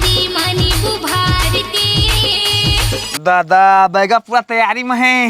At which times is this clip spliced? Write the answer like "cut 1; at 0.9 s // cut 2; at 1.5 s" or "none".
cut 1; at 3.1 s